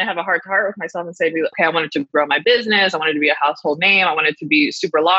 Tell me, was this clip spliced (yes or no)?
yes